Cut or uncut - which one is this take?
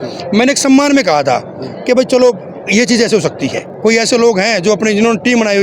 cut